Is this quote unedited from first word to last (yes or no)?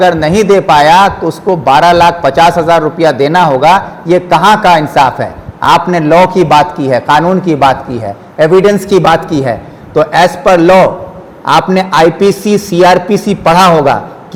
yes